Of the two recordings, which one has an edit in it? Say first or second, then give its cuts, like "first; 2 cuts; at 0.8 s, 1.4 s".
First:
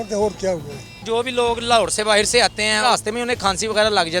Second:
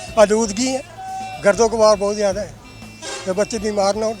first; 2 cuts; at 1.0 s, 2.8 s